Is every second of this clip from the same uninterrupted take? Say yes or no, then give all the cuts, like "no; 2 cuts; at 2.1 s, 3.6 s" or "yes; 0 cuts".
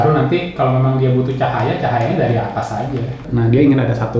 no; 1 cut; at 3.3 s